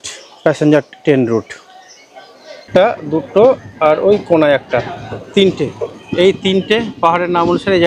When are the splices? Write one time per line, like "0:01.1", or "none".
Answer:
0:02.6